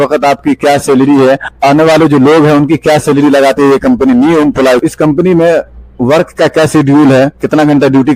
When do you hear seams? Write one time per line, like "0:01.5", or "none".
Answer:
none